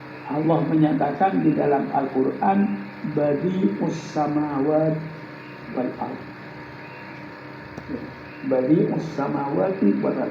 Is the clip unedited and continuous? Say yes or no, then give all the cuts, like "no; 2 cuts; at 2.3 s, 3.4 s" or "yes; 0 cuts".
no; 1 cut; at 4.0 s